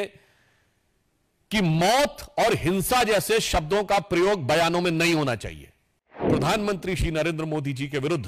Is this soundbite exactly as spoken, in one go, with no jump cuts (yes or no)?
no